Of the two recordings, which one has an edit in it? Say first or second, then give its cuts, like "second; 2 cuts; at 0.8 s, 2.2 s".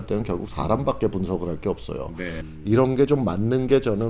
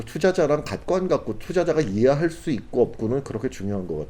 first; 1 cut; at 2.4 s